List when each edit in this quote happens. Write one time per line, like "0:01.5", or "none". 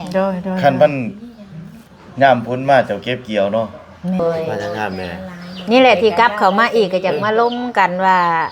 0:04.2